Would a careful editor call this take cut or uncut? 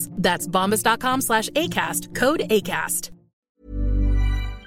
cut